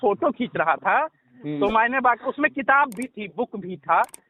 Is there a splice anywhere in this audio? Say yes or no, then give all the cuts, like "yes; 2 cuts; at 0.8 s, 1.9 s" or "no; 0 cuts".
no; 0 cuts